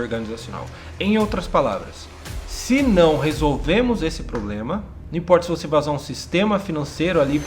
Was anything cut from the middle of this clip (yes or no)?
yes